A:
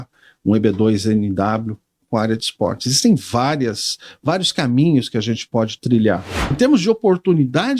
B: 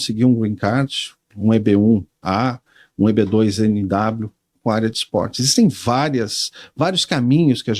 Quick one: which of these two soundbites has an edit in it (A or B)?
A